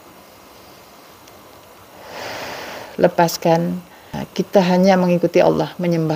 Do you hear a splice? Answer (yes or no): yes